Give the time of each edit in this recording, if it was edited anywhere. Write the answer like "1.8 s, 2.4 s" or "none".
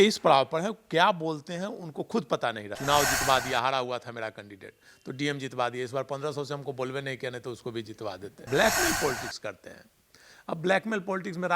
2.8 s, 8.4 s